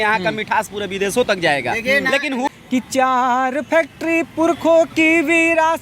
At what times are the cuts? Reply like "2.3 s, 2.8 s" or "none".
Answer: 2.5 s